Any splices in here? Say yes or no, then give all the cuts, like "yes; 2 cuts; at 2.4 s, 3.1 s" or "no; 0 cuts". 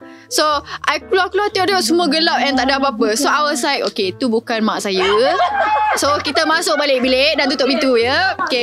no; 0 cuts